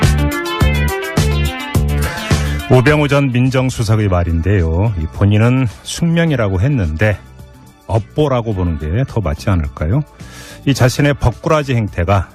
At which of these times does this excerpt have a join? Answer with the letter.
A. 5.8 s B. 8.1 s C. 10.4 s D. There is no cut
D